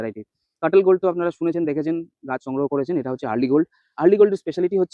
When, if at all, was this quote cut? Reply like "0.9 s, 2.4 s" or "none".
none